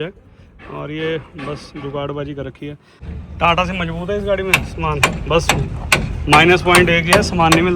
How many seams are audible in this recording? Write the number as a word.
one